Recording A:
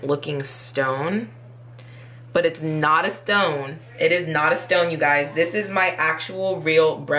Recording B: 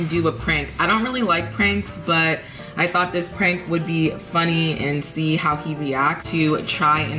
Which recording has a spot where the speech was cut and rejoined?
B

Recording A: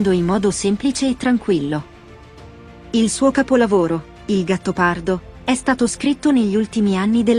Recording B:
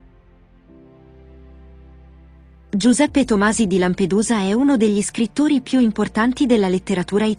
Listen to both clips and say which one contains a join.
B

